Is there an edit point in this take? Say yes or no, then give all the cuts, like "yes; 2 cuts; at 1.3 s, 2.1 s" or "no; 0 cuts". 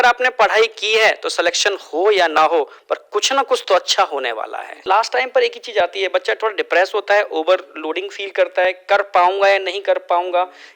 yes; 1 cut; at 4.8 s